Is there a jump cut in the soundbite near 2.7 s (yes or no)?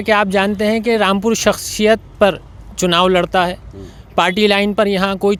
no